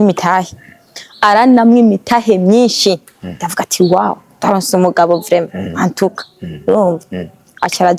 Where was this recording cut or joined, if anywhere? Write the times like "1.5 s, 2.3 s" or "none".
none